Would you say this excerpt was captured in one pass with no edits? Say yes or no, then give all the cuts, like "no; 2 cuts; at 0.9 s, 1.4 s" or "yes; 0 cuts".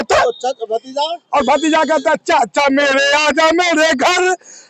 yes; 0 cuts